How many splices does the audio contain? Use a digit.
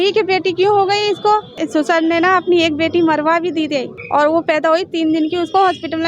2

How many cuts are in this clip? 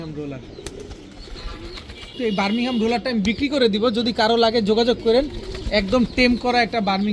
1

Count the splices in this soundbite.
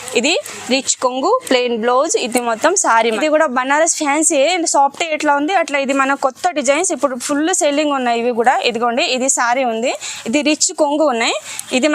1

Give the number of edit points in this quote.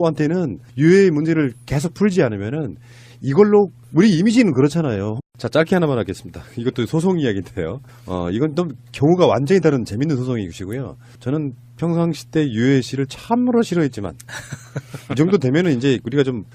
0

